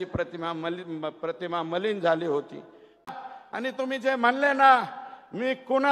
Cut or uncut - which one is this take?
cut